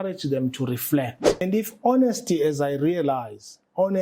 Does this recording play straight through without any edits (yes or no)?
no